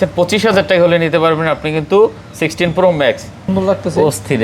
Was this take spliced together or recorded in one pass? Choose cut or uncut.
cut